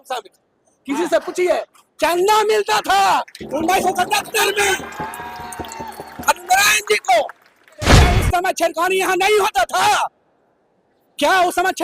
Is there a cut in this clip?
yes; 1 cut; at 8.0 s

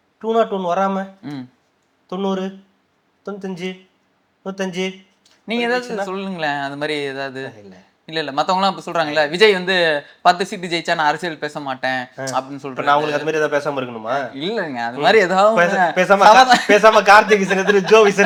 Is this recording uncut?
yes; 0 cuts

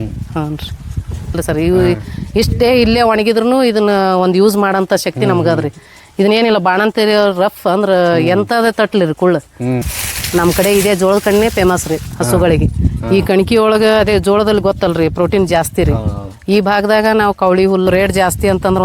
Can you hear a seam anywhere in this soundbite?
yes; 3 cuts; at 1.4 s, 9.9 s, 17.9 s

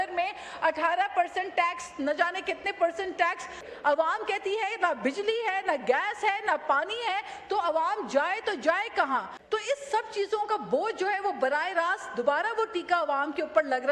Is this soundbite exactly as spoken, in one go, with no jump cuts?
no; 2 cuts; at 3.6 s, 9.3 s

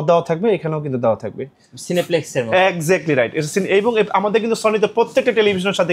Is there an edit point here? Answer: yes; 1 cut; at 1.7 s

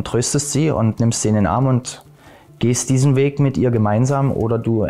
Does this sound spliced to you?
no; 0 cuts

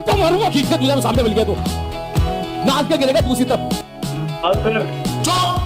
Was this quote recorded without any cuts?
yes; 0 cuts

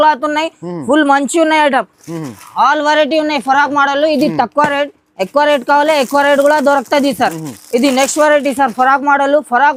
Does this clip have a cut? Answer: no; 0 cuts

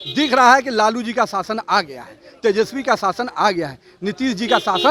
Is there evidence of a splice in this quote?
no; 0 cuts

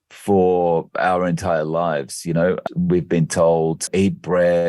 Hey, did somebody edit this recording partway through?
yes; 2 cuts; at 2.6 s, 3.8 s

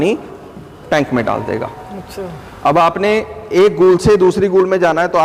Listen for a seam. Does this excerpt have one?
no; 0 cuts

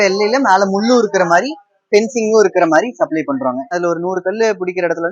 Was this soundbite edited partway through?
yes; 1 cut; at 3.7 s

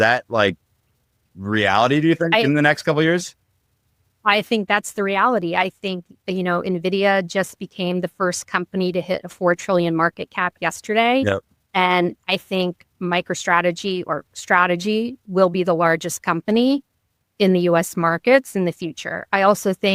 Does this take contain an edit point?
no; 0 cuts

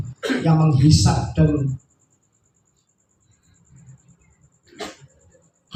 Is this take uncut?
yes; 0 cuts

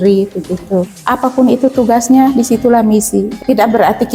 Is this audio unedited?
no; 2 cuts; at 1.0 s, 3.3 s

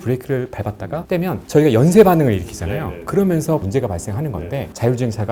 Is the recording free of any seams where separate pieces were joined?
yes; 0 cuts

